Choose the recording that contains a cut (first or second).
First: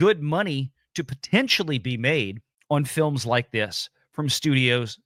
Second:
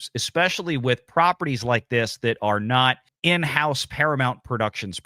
second